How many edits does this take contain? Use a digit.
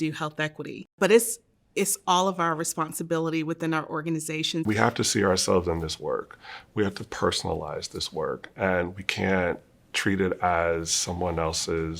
2